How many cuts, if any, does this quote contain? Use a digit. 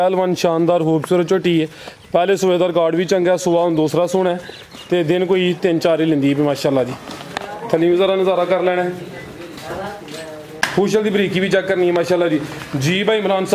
1